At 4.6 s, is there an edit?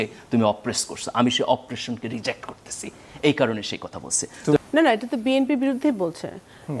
yes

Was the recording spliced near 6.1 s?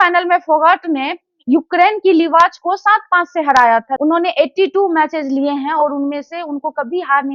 no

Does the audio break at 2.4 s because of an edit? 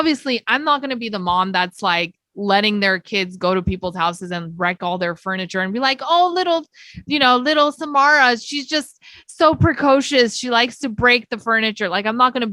no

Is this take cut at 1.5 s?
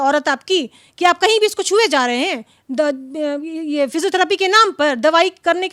no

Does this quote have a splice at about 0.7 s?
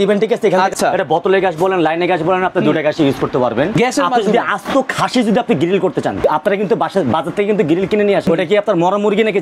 yes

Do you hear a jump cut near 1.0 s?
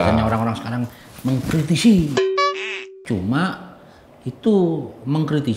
no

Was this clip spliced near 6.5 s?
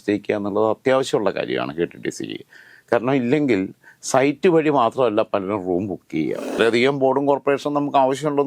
yes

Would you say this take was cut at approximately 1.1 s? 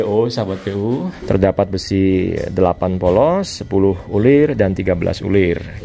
yes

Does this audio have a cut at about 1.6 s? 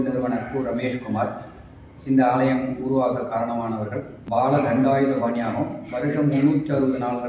no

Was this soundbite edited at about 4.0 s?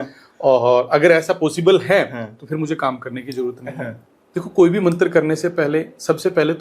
yes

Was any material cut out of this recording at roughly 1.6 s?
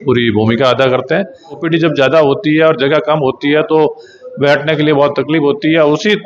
yes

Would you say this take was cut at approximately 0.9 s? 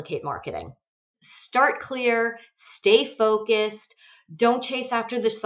yes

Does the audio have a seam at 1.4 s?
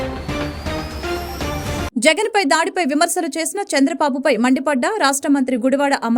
yes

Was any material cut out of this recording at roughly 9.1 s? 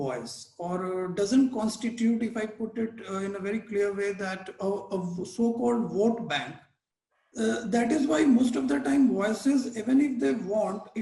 no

